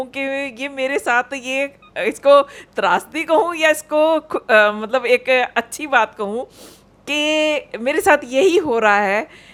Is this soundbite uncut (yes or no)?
yes